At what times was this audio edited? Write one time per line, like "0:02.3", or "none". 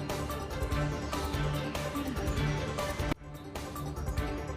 0:00.9